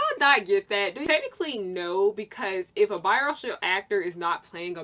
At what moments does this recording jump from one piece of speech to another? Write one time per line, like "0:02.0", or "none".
0:01.0